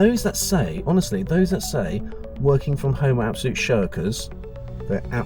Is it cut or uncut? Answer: uncut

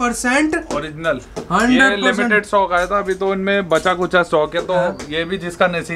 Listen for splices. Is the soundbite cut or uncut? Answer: uncut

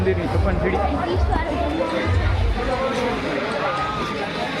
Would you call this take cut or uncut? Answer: uncut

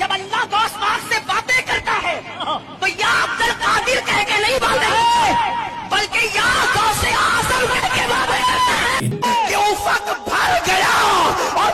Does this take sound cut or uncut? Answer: cut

